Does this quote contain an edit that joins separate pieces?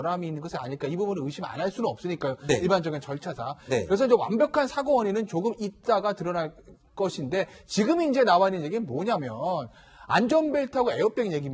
no; 0 cuts

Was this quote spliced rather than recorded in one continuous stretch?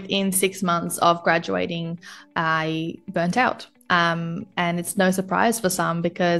no; 0 cuts

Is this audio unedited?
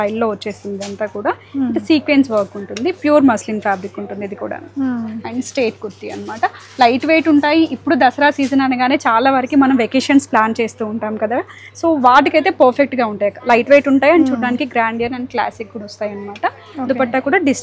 yes; 0 cuts

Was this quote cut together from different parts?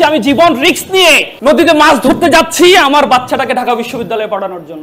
yes; 1 cut; at 1.3 s

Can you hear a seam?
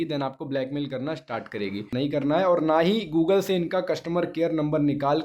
yes; 1 cut; at 1.9 s

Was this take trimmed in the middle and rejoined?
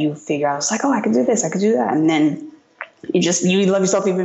no; 0 cuts

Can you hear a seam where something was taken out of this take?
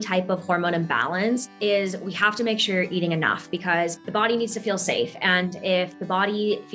yes; 2 cuts; at 1.5 s, 4.0 s

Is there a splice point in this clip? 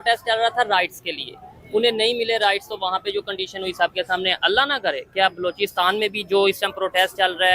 no; 0 cuts

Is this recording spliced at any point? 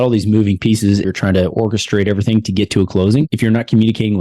yes; 2 cuts; at 1.1 s, 3.3 s

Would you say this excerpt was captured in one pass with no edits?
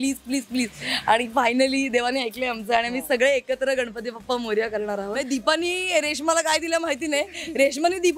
no; 1 cut; at 5.2 s

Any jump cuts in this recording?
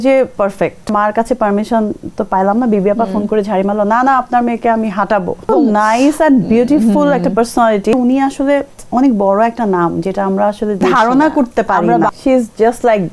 yes; 5 cuts; at 0.9 s, 5.5 s, 7.9 s, 10.8 s, 12.1 s

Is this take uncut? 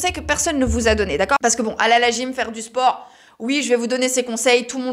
no; 1 cut; at 1.6 s

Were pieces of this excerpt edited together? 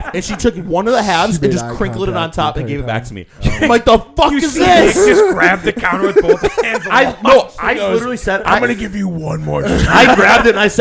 no; 0 cuts

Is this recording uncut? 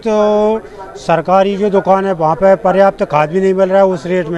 yes; 0 cuts

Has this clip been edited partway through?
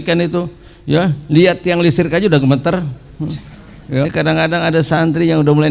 yes; 1 cut; at 4.0 s

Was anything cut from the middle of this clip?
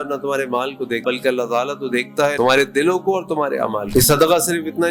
yes; 3 cuts; at 1.0 s, 2.3 s, 3.9 s

